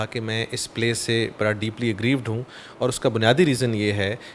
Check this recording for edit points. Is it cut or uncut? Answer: uncut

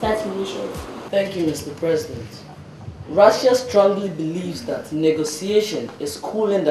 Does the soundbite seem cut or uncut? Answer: cut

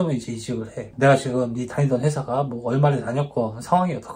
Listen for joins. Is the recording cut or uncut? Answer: cut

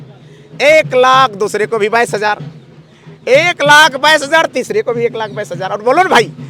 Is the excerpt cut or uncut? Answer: uncut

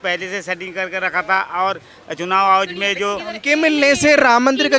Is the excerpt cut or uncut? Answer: uncut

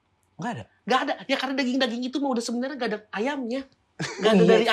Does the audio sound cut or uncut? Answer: uncut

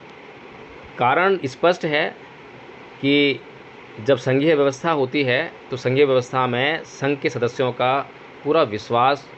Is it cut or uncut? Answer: uncut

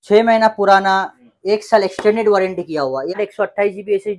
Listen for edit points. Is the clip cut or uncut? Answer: cut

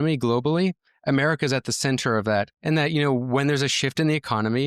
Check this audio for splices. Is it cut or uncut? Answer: cut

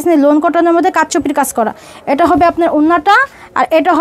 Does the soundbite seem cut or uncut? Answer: uncut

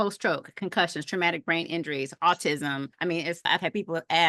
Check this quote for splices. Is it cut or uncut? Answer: cut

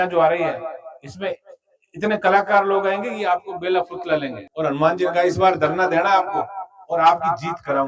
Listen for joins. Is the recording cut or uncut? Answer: cut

